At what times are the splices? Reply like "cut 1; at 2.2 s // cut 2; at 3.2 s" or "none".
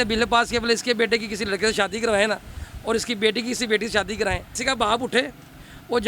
cut 1; at 4.5 s